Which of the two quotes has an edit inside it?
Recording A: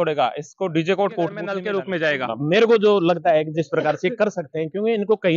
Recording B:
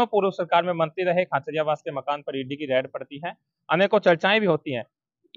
A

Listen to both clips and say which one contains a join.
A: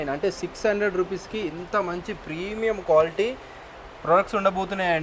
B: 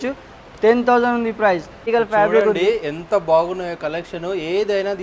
B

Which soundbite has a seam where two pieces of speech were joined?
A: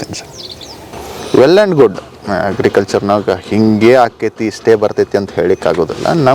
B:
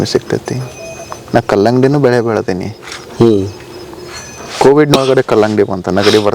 A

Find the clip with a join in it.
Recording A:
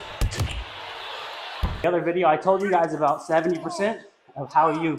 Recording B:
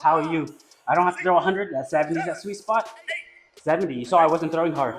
A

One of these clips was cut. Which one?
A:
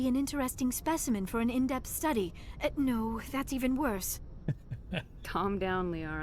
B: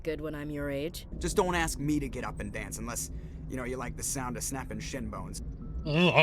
B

